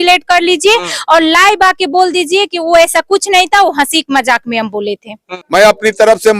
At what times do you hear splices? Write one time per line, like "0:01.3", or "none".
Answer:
0:05.3

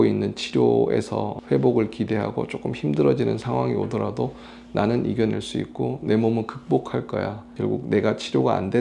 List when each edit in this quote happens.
0:07.5

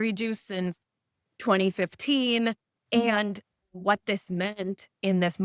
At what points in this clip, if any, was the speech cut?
none

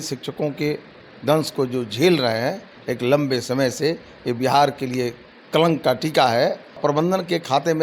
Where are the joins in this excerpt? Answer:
0:06.8

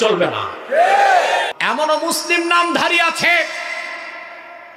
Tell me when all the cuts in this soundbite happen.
0:01.5

